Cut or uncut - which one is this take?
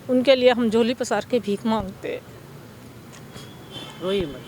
uncut